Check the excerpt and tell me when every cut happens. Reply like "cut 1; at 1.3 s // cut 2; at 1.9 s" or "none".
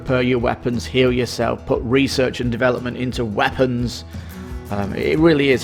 none